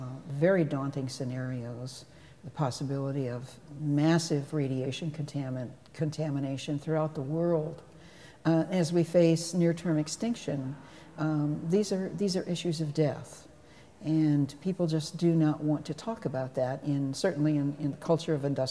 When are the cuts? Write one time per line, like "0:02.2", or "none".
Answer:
none